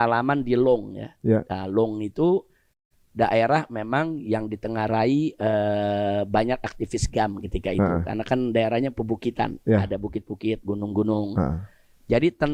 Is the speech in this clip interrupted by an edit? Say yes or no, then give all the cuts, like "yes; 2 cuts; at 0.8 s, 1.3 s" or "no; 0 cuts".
no; 0 cuts